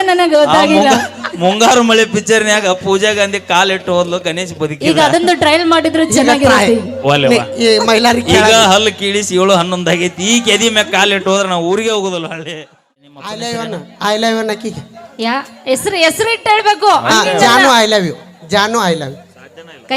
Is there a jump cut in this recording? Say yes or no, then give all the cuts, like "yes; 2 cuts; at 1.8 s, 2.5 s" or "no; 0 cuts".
yes; 1 cut; at 13.3 s